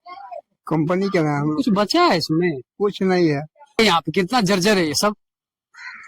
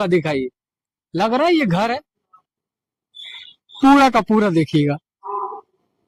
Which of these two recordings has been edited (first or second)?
first